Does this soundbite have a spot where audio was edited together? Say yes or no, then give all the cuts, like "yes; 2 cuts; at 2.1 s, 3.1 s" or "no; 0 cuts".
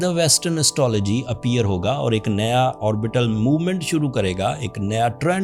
no; 0 cuts